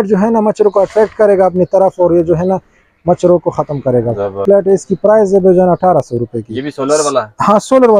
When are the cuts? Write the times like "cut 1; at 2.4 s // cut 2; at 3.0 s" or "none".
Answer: cut 1; at 4.4 s